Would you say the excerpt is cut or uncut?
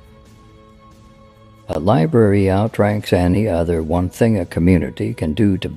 cut